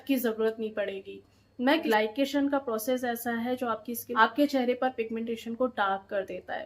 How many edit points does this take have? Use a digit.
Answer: 2